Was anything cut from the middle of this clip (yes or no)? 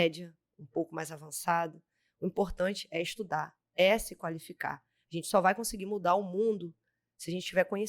no